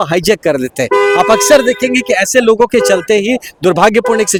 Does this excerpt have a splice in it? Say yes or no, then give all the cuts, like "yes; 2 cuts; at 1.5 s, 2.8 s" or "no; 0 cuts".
no; 0 cuts